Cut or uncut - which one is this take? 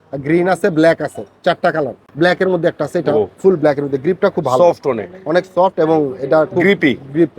cut